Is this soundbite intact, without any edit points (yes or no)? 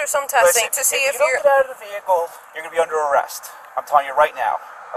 yes